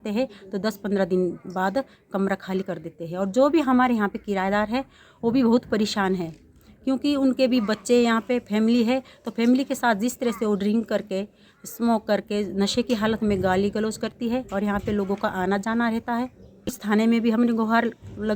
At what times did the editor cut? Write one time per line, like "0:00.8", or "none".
0:16.8